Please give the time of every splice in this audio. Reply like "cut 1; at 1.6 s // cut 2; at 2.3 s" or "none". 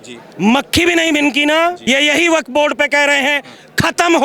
cut 1; at 1.8 s